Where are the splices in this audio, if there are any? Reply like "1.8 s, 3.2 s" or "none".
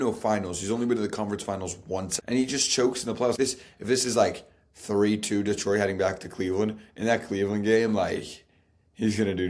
2.1 s, 3.4 s